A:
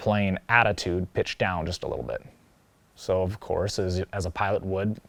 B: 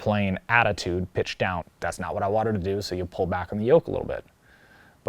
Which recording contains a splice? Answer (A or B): B